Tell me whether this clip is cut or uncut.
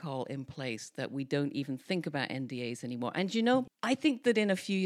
cut